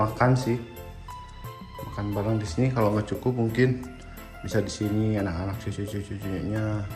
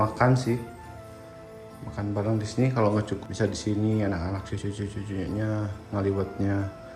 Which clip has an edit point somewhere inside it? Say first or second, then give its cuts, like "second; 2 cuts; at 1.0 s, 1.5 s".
second; 1 cut; at 3.1 s